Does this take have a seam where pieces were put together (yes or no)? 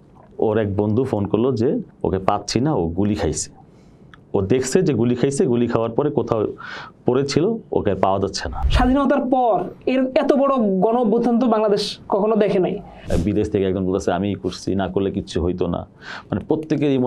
yes